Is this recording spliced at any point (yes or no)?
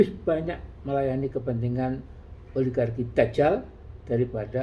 no